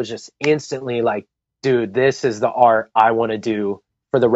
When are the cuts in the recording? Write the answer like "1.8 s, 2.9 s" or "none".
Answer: none